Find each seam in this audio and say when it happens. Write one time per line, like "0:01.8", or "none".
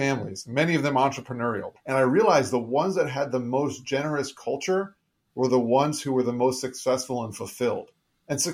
0:01.7